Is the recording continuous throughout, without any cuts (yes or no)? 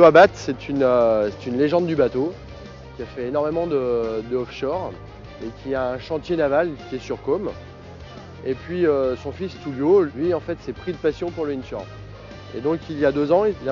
yes